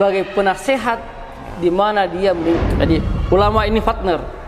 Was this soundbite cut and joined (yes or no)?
yes